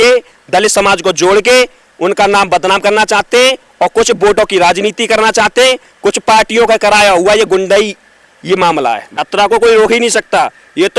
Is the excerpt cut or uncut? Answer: cut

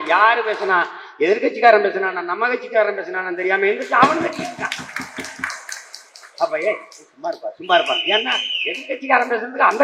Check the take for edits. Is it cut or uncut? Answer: uncut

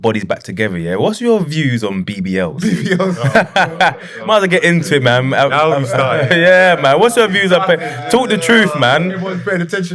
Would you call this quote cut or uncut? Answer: uncut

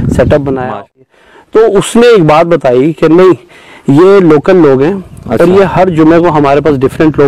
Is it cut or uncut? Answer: cut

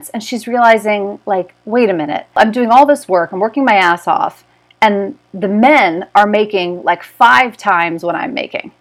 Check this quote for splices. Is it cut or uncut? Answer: uncut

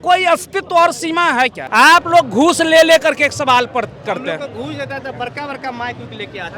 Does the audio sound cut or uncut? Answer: cut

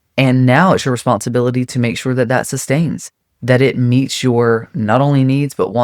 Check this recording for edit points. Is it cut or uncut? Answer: uncut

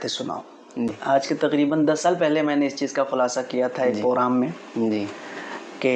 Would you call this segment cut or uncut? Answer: cut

